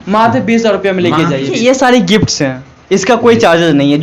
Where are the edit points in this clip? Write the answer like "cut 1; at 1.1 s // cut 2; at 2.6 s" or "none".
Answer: cut 1; at 1.5 s